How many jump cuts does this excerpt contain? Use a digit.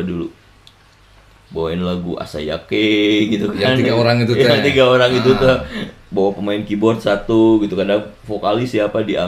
0